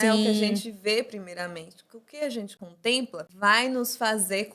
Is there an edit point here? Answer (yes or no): yes